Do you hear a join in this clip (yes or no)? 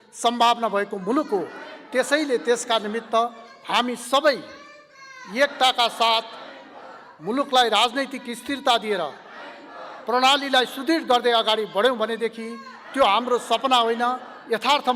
no